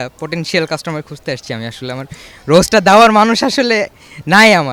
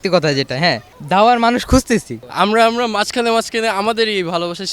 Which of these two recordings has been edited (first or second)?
second